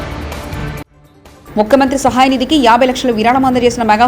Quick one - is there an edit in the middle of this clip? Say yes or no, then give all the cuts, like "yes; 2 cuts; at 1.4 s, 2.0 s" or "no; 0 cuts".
no; 0 cuts